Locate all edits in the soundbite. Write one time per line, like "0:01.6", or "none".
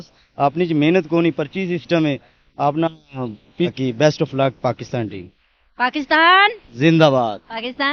0:03.7